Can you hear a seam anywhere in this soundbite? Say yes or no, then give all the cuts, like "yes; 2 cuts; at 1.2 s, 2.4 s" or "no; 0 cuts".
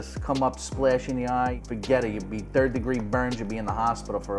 yes; 1 cut; at 1.6 s